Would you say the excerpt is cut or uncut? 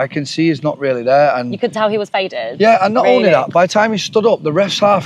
uncut